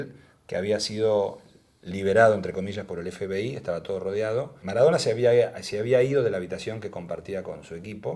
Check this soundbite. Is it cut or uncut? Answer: cut